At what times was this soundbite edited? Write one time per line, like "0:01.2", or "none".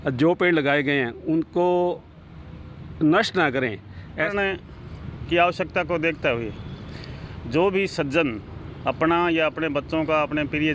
0:04.3

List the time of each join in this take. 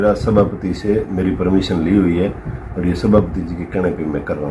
none

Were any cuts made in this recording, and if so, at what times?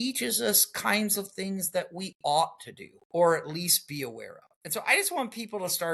none

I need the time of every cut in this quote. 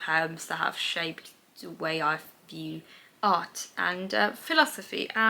none

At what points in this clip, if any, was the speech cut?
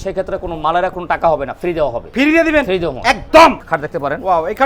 0:03.6

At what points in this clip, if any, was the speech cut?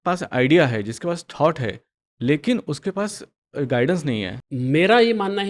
0:04.4

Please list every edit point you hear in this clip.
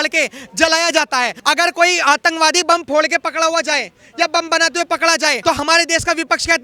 0:01.3
0:05.4

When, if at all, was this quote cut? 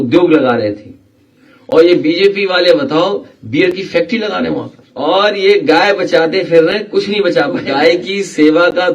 0:04.8
0:07.7

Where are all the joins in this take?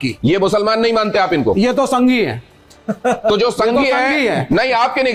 none

